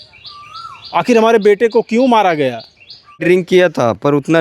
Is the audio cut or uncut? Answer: cut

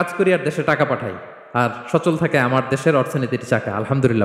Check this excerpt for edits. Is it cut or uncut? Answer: uncut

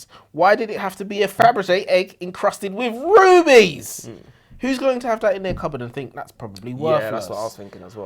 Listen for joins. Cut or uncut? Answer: cut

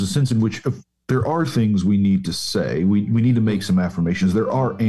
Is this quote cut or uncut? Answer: uncut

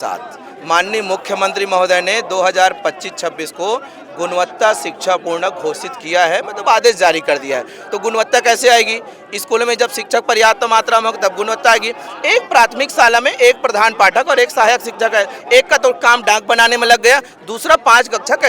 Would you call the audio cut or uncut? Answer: uncut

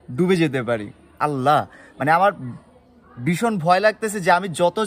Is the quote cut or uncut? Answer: cut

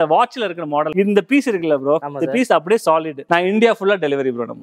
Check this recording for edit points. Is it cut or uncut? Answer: cut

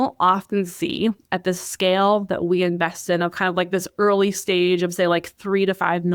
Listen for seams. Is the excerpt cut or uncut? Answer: uncut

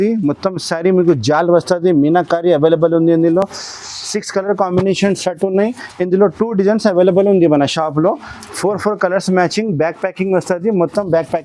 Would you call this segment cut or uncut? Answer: uncut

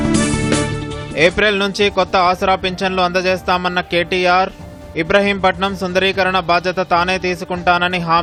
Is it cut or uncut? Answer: uncut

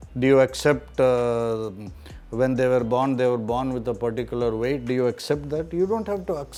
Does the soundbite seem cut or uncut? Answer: uncut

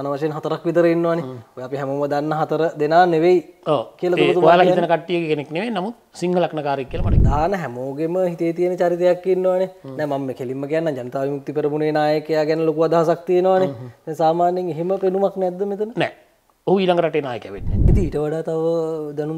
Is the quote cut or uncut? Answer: cut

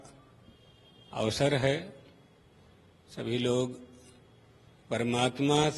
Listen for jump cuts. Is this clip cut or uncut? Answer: uncut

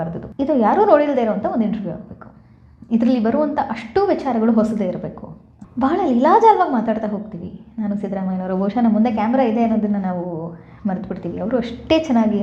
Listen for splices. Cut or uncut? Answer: uncut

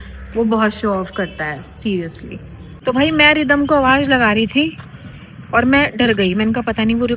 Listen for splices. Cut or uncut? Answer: uncut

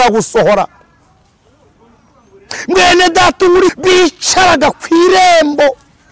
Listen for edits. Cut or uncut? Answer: cut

